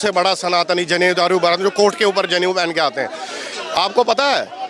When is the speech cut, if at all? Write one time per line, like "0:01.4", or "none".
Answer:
none